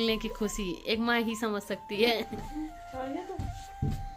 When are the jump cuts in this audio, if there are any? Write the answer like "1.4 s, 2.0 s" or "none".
none